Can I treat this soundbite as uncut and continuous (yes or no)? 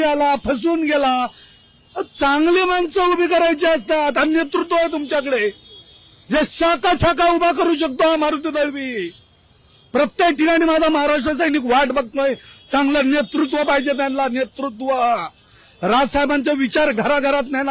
yes